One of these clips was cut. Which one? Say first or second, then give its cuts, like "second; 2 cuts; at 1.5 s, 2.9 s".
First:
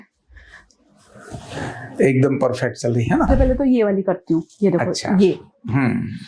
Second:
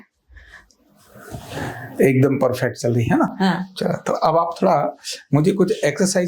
first; 1 cut; at 3.3 s